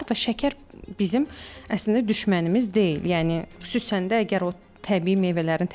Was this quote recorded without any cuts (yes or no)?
yes